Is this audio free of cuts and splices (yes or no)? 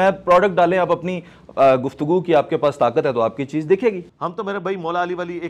no